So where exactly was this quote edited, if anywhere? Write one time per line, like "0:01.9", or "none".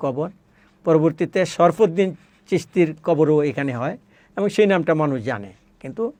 none